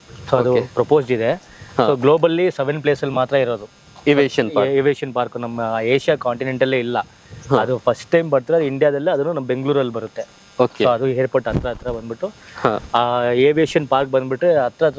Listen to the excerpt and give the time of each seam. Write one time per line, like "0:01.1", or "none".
none

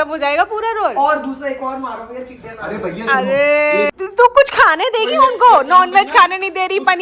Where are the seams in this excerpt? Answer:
0:03.9

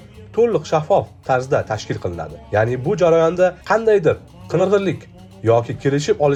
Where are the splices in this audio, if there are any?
none

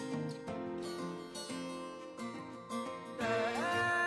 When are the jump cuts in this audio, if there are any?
none

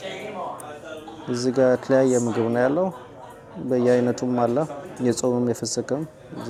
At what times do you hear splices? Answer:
none

